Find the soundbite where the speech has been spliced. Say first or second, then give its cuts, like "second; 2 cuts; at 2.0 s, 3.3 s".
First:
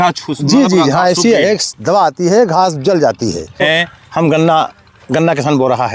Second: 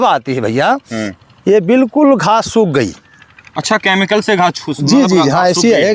first; 1 cut; at 3.6 s